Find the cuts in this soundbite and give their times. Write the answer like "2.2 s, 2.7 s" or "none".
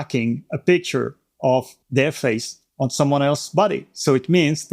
1.8 s, 2.6 s